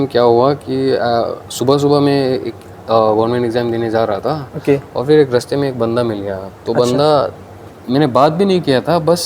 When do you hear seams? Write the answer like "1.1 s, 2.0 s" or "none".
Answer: none